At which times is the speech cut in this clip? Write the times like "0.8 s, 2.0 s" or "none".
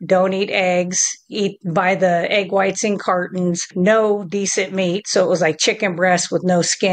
3.7 s